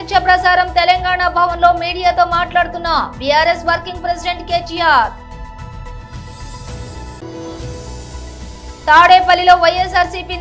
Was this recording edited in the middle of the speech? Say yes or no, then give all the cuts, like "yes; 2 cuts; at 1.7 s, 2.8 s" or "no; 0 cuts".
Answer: no; 0 cuts